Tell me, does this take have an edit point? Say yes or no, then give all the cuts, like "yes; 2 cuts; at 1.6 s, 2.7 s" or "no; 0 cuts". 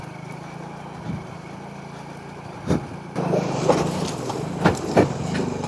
yes; 1 cut; at 3.1 s